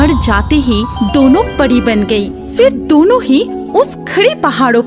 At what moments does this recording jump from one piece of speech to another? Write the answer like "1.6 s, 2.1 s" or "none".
none